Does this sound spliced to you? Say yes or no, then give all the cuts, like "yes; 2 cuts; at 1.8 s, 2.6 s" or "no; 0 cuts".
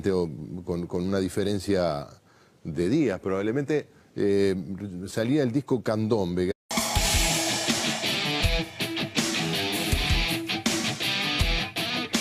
no; 0 cuts